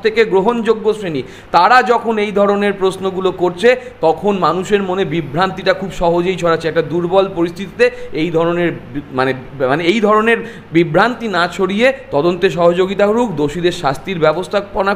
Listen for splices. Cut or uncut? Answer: uncut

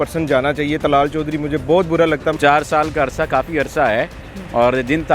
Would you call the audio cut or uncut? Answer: cut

